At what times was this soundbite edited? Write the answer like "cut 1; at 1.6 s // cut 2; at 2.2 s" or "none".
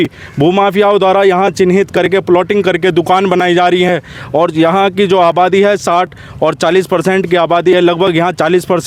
none